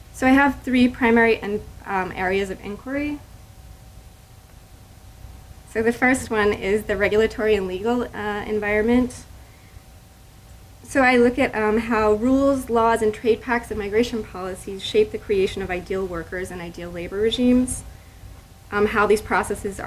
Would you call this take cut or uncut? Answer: uncut